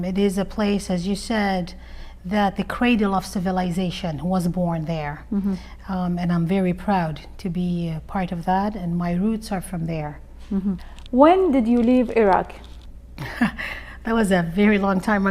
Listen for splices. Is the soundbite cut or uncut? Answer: uncut